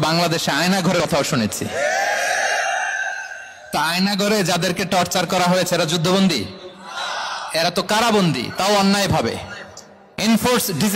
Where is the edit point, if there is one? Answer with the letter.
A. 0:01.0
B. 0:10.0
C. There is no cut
A